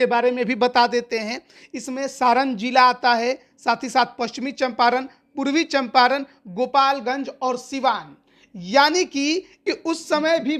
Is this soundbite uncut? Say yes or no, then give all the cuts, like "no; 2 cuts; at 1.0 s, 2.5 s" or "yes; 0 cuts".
no; 1 cut; at 9.6 s